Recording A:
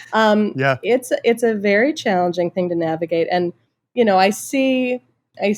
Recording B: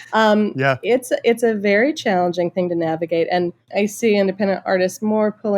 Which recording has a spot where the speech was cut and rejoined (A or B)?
B